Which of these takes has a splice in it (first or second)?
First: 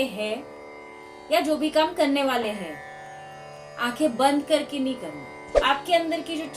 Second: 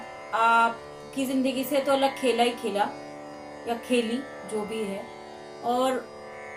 first